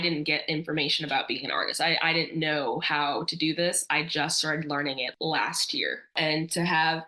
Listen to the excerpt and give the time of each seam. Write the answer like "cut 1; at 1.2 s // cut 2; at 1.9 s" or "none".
cut 1; at 5.1 s // cut 2; at 6.2 s